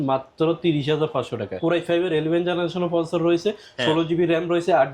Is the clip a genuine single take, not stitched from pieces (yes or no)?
no